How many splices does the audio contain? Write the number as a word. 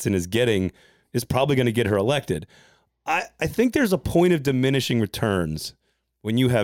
zero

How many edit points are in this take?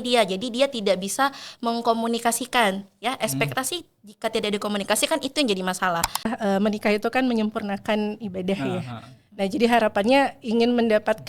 one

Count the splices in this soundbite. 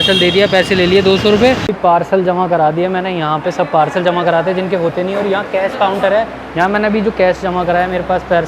one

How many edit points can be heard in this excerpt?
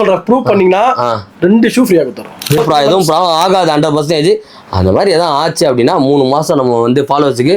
one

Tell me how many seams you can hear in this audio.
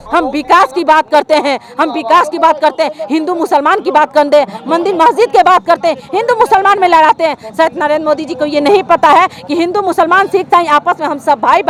zero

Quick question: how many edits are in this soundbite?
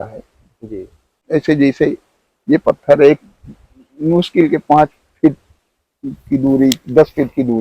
one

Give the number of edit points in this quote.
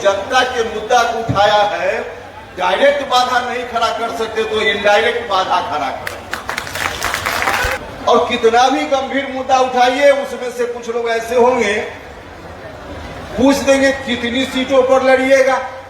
one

